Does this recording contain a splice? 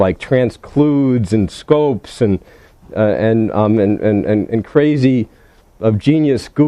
yes; 1 cut; at 3.2 s

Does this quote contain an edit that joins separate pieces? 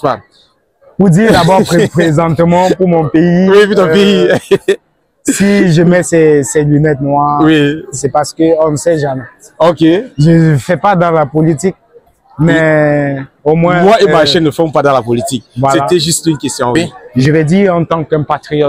yes; 1 cut; at 16.8 s

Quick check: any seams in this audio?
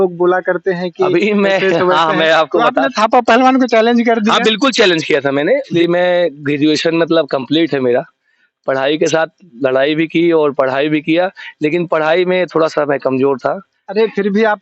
yes; 1 cut; at 5.7 s

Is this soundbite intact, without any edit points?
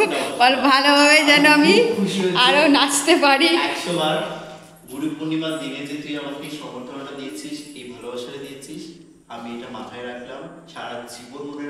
yes; 0 cuts

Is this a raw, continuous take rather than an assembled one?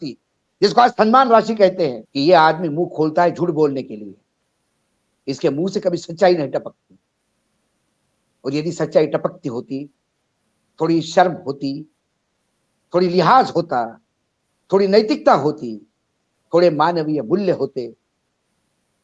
no; 1 cut; at 2.0 s

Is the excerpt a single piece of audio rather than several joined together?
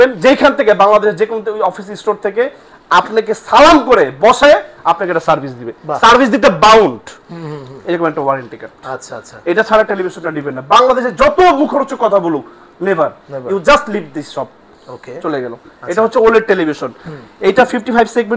yes; 0 cuts

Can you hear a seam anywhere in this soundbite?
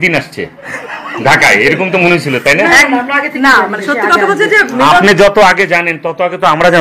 no; 0 cuts

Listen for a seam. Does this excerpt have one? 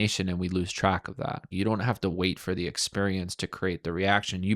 yes; 1 cut; at 1.5 s

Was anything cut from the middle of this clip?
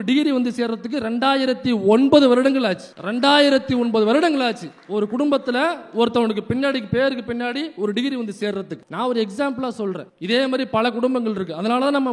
no; 0 cuts

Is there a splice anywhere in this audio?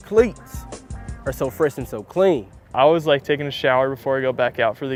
no; 0 cuts

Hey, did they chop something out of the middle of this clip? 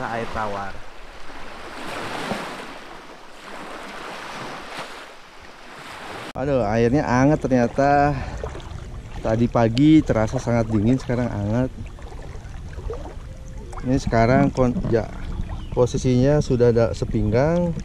yes; 1 cut; at 6.2 s

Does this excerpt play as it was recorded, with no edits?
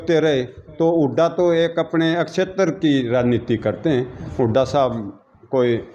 yes; 0 cuts

